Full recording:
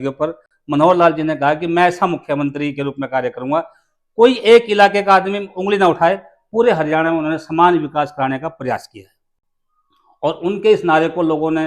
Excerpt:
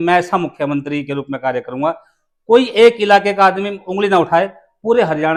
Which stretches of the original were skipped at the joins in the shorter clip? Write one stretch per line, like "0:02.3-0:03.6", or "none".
none